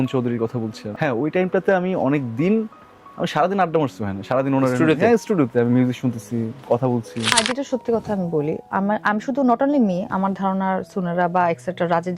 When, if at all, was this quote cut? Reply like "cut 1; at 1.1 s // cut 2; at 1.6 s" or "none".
cut 1; at 7.2 s